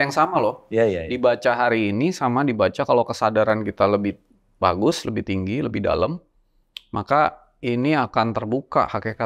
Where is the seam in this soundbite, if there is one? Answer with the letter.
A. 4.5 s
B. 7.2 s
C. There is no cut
C